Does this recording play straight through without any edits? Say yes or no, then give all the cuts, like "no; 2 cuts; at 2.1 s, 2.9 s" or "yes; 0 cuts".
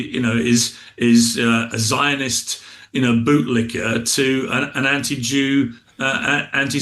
yes; 0 cuts